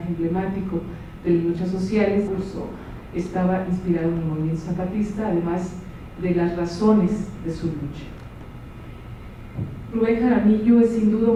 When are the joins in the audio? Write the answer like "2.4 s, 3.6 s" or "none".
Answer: none

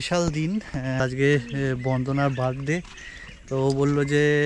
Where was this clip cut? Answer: 1.0 s

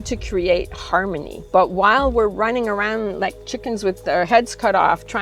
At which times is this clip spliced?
1.3 s

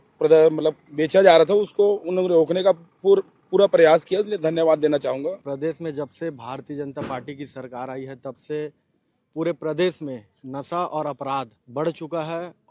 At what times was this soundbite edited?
5.4 s, 11.6 s

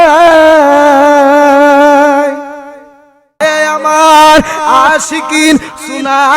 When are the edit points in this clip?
3.4 s

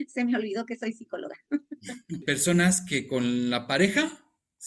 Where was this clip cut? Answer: 2.2 s

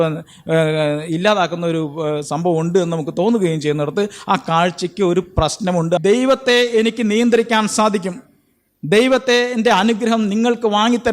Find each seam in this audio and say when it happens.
6.0 s

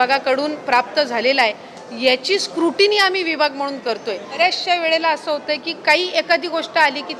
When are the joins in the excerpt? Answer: 4.4 s

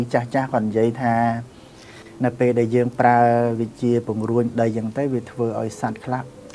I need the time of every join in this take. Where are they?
none

